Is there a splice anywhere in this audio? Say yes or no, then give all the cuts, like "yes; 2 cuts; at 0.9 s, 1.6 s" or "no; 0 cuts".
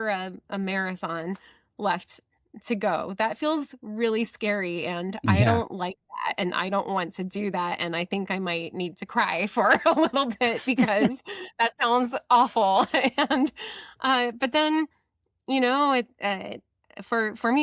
no; 0 cuts